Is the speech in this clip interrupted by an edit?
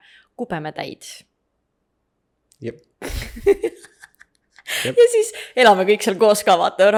no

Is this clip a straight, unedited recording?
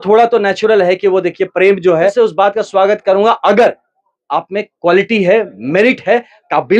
no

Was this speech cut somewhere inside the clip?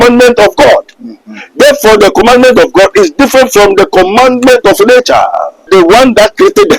yes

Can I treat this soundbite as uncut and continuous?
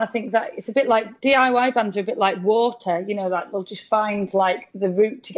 no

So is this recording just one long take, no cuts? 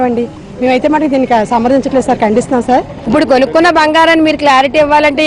no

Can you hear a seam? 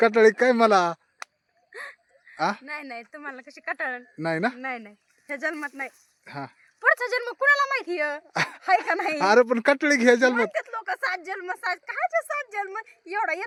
no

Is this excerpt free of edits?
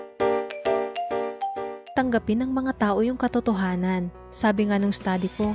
no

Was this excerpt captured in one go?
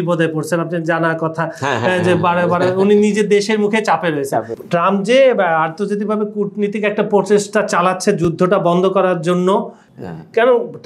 no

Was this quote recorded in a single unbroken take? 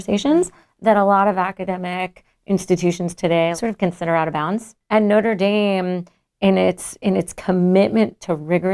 no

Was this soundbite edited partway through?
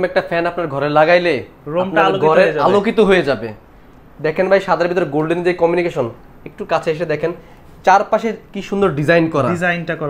no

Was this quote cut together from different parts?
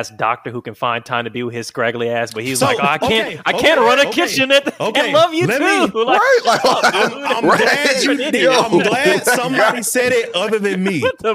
no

